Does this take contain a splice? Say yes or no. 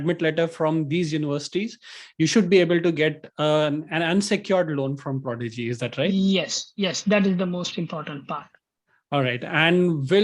no